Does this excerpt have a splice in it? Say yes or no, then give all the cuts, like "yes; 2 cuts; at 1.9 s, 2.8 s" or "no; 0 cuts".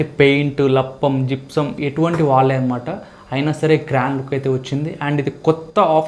yes; 1 cut; at 1.8 s